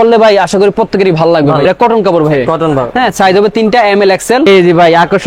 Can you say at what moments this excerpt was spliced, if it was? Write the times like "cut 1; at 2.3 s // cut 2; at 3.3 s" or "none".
cut 1; at 1.6 s // cut 2; at 4.5 s